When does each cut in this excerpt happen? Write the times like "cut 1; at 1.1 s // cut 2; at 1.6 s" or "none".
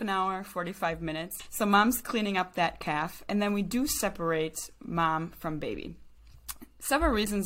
cut 1; at 1.4 s